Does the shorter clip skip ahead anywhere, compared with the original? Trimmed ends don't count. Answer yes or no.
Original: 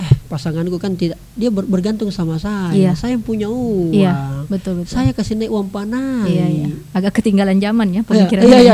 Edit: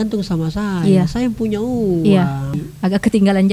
yes